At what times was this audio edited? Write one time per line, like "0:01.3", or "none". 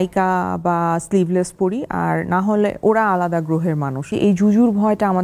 0:04.1